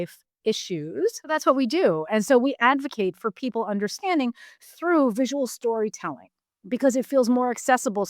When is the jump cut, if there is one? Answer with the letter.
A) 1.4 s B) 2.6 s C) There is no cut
A